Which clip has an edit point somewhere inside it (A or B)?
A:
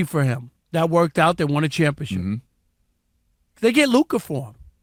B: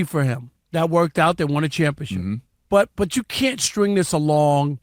B